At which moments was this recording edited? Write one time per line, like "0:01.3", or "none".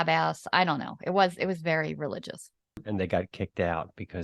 0:02.8

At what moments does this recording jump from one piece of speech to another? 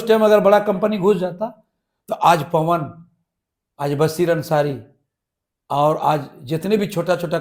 none

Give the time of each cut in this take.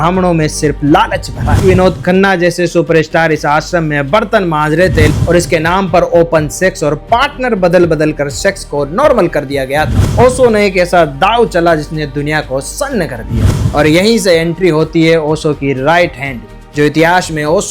0:01.6
0:05.1
0:10.0
0:13.5

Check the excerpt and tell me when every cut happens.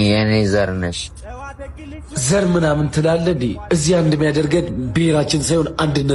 none

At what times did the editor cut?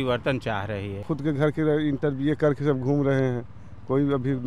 0:01.1

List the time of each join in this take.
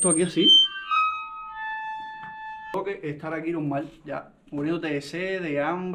0:02.7

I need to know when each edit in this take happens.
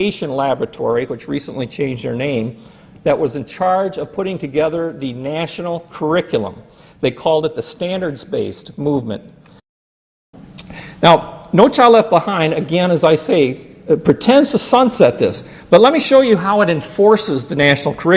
0:10.0

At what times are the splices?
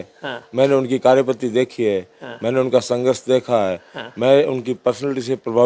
none

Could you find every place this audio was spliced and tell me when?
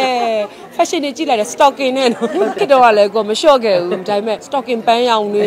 0:02.6
0:04.5

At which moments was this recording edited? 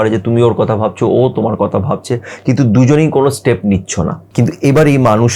0:04.2

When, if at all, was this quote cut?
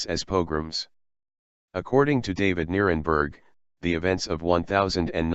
0:02.5

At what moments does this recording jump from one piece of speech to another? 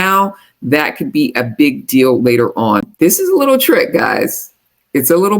0:02.9

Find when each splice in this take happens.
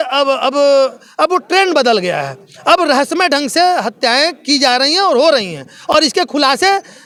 none

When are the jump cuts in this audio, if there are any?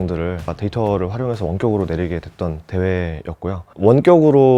none

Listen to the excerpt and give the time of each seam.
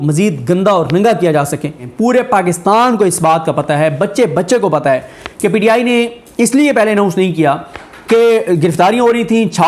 0:01.8

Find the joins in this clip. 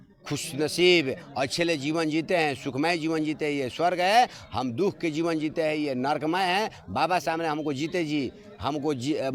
none

